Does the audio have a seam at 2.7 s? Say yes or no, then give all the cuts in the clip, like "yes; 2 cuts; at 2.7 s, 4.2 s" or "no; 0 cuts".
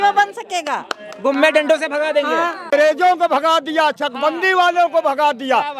yes; 1 cut; at 2.7 s